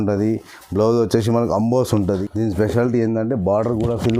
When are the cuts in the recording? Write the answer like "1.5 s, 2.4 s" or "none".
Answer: 2.2 s